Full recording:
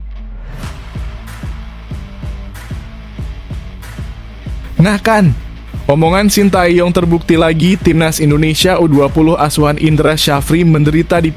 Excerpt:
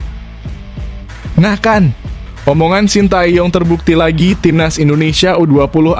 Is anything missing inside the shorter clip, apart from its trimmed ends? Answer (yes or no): yes